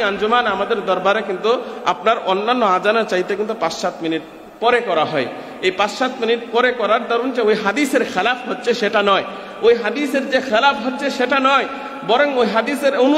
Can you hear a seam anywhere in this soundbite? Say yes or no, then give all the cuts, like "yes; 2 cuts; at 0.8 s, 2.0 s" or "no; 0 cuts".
no; 0 cuts